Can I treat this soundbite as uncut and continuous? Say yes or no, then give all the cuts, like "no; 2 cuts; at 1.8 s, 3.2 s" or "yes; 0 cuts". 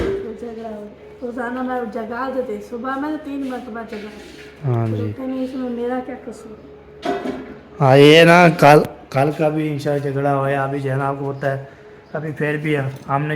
yes; 0 cuts